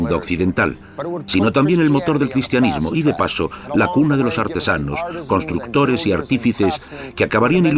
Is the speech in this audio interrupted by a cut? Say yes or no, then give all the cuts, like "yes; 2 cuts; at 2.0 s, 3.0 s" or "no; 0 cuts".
no; 0 cuts